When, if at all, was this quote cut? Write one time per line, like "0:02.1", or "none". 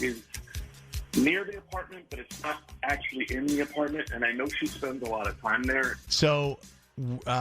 0:06.0